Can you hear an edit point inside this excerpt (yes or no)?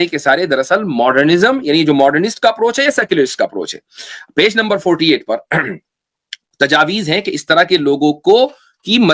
no